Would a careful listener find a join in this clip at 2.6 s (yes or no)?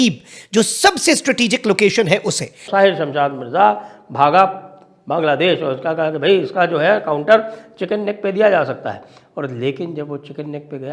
yes